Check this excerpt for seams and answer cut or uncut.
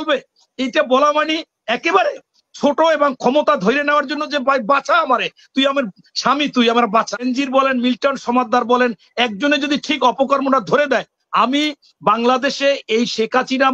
cut